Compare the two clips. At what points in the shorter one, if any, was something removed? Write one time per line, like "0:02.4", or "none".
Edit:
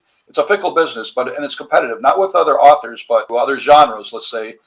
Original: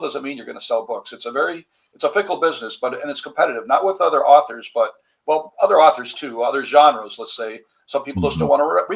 0:03.3